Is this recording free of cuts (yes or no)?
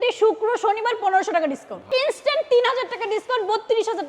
no